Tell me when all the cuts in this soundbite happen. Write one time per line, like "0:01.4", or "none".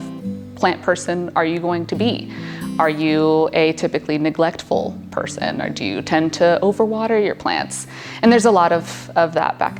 none